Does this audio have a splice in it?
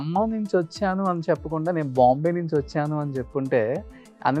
no; 0 cuts

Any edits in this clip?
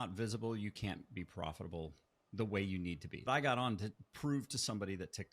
yes; 1 cut; at 3.2 s

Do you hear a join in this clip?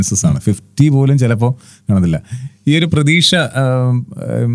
no; 0 cuts

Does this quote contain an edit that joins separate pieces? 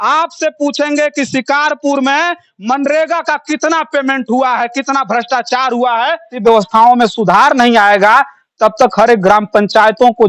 yes; 1 cut; at 6.3 s

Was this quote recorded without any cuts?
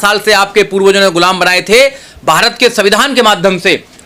yes; 0 cuts

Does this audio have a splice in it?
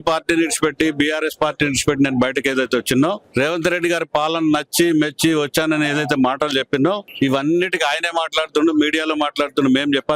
yes; 2 cuts; at 3.2 s, 7.1 s

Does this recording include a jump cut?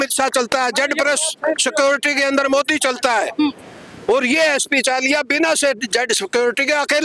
no; 0 cuts

